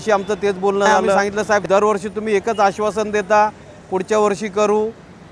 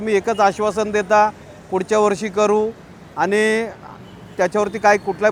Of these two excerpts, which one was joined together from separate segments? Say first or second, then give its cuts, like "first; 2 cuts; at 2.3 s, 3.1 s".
first; 1 cut; at 1.2 s